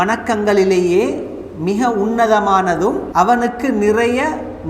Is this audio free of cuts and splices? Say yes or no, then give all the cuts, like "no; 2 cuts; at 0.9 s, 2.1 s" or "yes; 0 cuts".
no; 1 cut; at 3.0 s